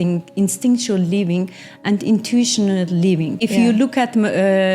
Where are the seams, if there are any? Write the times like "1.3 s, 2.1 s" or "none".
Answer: 3.4 s